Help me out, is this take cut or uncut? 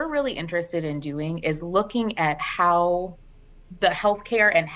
uncut